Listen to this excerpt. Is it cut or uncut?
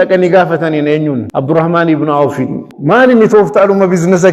cut